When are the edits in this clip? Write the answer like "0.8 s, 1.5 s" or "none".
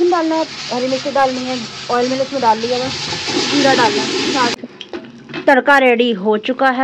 4.6 s